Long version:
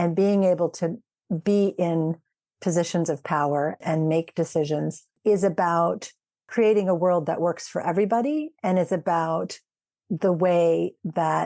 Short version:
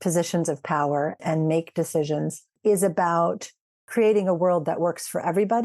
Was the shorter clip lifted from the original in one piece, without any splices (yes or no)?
yes